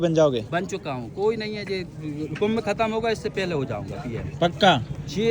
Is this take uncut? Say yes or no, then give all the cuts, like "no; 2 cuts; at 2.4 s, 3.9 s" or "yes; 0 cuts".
yes; 0 cuts